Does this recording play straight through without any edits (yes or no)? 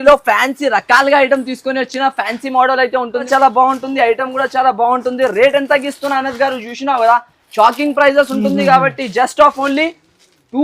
no